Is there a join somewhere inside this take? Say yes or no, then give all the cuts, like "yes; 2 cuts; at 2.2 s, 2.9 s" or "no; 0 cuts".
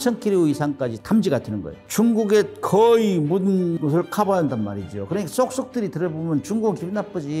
yes; 3 cuts; at 1.0 s, 1.8 s, 3.8 s